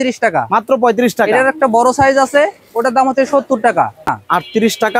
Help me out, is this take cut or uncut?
cut